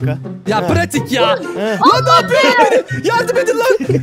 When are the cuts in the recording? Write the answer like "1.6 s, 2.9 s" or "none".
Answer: 1.6 s